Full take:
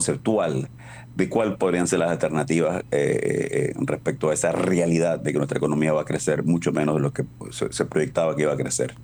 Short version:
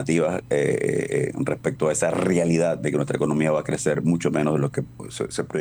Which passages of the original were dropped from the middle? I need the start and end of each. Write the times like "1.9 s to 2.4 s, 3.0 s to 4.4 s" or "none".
none